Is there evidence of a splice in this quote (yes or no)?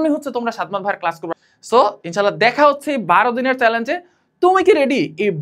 yes